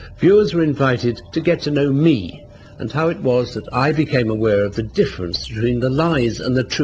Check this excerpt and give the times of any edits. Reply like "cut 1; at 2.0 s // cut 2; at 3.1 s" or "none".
cut 1; at 2.0 s